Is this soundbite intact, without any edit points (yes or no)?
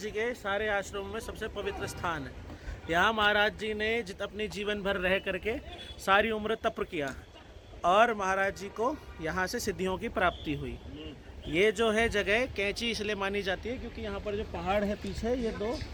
yes